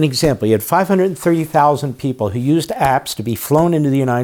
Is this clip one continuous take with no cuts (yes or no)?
yes